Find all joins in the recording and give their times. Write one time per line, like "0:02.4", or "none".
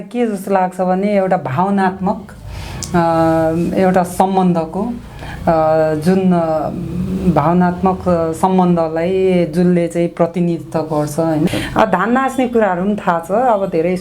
0:11.5